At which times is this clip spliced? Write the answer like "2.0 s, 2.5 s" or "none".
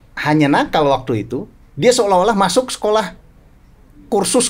none

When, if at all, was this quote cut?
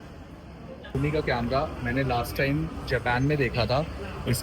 1.0 s

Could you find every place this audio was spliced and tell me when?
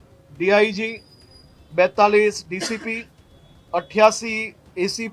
none

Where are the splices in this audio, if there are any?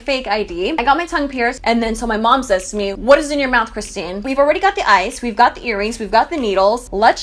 1.6 s, 3.0 s, 4.3 s

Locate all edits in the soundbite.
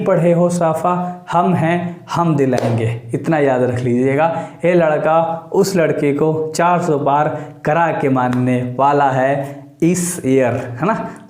none

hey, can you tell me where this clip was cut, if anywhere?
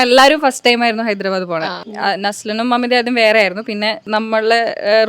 1.8 s, 4.0 s

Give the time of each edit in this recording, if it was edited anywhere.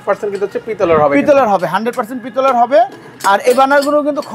none

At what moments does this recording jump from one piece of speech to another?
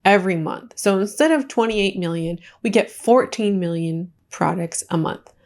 4.2 s

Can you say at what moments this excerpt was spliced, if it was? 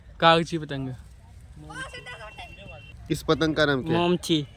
3.2 s

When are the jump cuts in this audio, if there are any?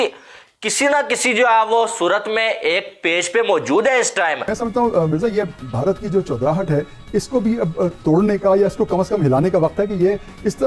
4.5 s

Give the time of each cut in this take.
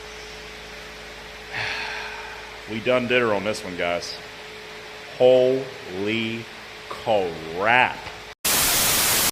4.4 s, 8.4 s

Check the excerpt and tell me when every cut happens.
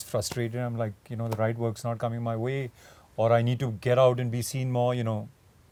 none

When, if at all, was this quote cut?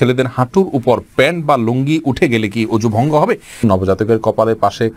3.6 s

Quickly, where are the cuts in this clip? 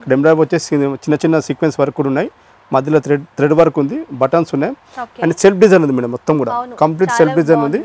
none

